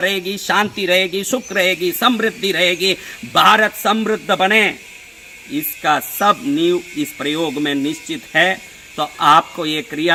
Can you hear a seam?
no; 0 cuts

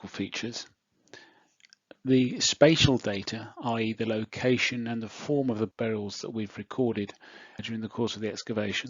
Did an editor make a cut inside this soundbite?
yes; 2 cuts; at 5.7 s, 7.6 s

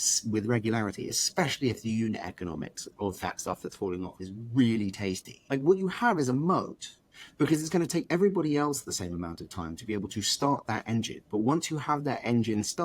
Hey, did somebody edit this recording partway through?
yes; 1 cut; at 5.3 s

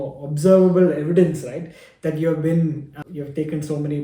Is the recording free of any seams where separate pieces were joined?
no; 1 cut; at 2.9 s

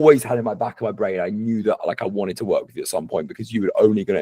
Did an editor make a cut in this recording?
no; 0 cuts

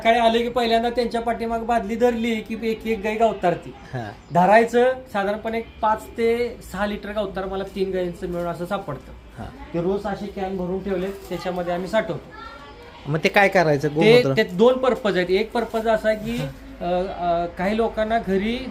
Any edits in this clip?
no; 0 cuts

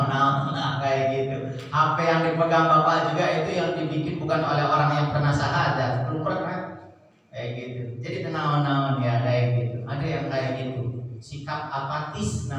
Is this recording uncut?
yes; 0 cuts

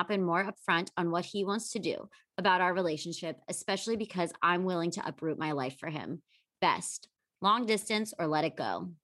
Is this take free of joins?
yes; 0 cuts

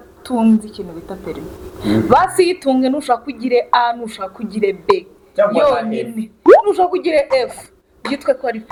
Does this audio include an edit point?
no; 0 cuts

